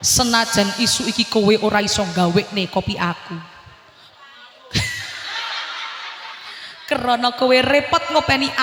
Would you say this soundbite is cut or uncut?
uncut